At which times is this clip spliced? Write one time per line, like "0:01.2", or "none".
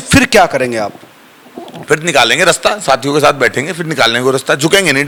none

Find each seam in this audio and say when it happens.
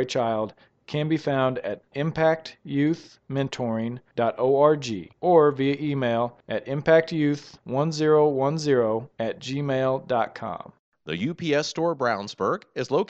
0:10.8

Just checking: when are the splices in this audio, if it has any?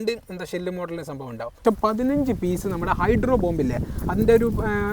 0:01.6

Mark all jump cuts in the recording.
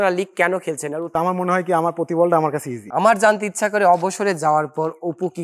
0:01.1
0:02.8

